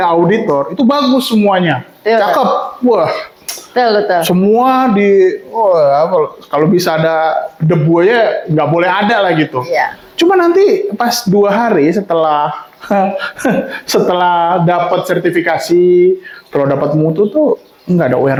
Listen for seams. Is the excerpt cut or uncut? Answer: uncut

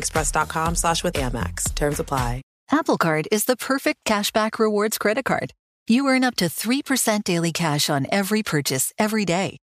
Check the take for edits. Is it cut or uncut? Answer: cut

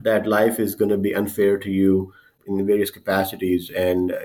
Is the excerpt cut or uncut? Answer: cut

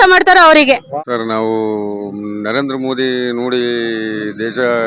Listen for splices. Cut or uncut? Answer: cut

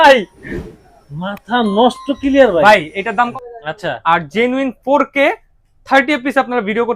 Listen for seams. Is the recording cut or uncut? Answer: cut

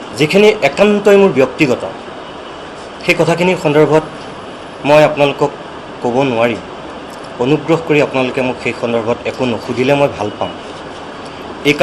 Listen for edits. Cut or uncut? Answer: uncut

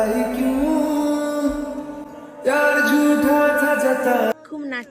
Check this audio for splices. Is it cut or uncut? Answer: uncut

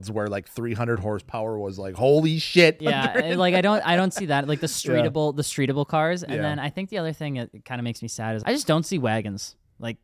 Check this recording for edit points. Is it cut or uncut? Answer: cut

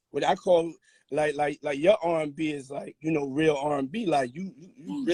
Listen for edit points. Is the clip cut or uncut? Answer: uncut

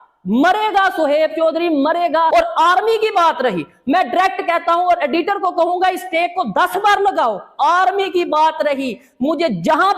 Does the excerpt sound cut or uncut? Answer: cut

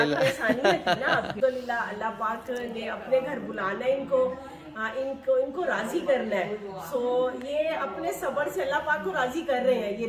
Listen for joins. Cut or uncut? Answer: cut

